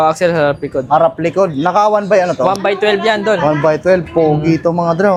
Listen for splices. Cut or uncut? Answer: uncut